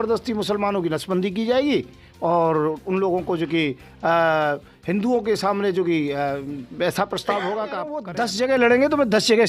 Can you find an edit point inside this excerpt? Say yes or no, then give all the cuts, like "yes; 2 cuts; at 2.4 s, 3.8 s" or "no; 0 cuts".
yes; 1 cut; at 8.1 s